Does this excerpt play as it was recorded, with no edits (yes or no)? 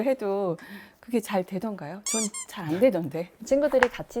yes